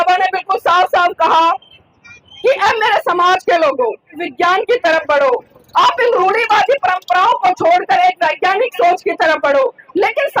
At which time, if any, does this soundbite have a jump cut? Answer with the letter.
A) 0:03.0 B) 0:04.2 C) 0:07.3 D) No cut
B